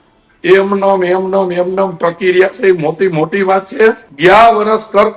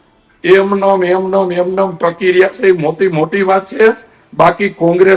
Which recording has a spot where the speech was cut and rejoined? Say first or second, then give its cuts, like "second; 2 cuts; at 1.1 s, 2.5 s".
first; 1 cut; at 4.1 s